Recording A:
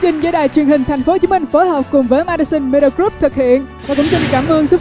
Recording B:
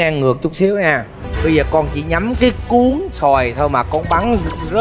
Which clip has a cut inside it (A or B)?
B